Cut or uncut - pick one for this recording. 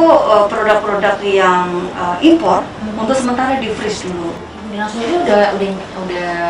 cut